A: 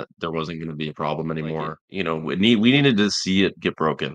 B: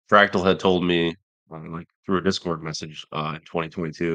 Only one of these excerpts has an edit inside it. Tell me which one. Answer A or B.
A